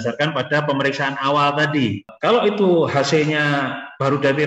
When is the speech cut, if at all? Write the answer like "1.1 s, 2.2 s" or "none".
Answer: 2.1 s